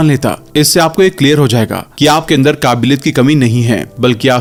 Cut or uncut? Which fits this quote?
uncut